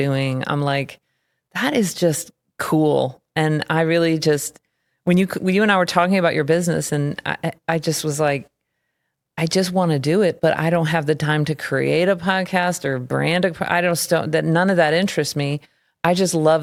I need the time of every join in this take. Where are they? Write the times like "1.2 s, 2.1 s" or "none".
none